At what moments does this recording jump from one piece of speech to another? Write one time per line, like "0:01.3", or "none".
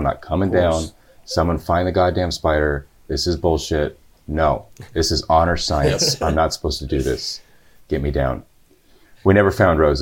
none